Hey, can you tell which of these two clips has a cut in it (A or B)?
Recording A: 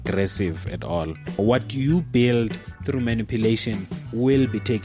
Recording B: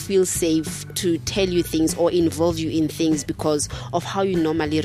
A